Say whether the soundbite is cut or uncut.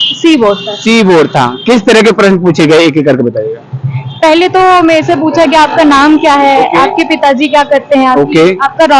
uncut